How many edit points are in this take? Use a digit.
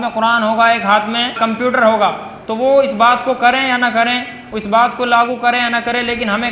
1